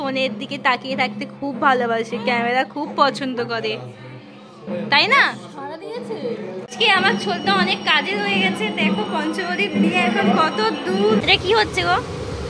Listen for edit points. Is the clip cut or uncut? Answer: cut